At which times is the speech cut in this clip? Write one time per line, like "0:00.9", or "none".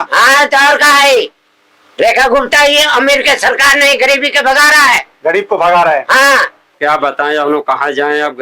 0:06.8